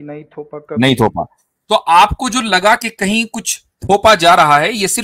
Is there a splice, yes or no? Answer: no